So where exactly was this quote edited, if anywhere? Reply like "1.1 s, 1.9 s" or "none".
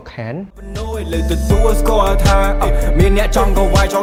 none